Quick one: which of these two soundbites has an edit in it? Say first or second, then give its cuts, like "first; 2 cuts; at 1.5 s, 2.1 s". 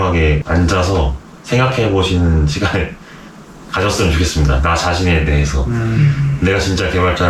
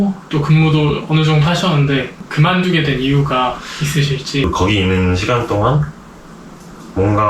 second; 2 cuts; at 2.2 s, 4.4 s